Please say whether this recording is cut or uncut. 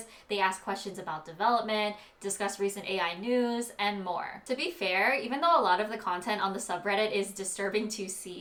uncut